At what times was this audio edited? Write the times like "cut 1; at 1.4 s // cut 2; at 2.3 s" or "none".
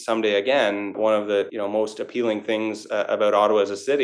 cut 1; at 1.0 s

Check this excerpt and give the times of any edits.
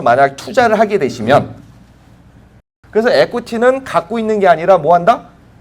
cut 1; at 2.7 s

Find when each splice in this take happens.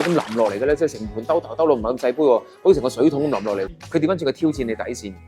cut 1; at 3.7 s

